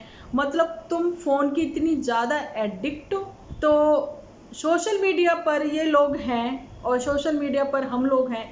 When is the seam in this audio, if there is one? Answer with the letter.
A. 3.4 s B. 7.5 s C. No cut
A